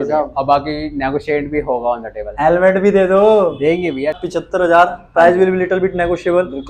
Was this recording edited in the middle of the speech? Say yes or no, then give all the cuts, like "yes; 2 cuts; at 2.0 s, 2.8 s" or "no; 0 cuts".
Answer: yes; 1 cut; at 4.2 s